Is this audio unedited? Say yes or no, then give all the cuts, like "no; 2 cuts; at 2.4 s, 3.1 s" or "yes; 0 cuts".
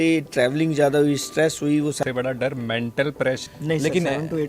no; 2 cuts; at 2.0 s, 3.4 s